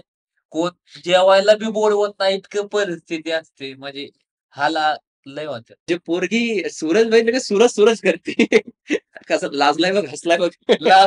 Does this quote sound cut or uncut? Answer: cut